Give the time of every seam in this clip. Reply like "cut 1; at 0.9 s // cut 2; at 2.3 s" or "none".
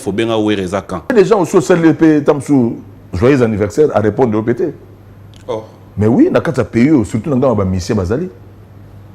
cut 1; at 1.1 s